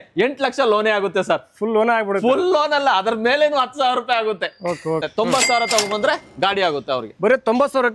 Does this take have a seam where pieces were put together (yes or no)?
yes